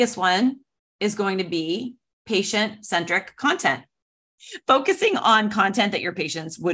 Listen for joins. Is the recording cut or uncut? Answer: cut